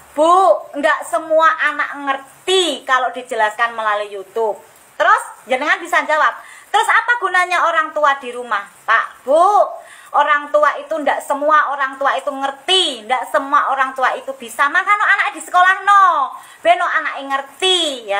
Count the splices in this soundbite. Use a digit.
0